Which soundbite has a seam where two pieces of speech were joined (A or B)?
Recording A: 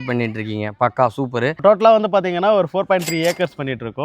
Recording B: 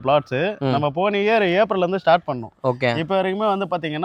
A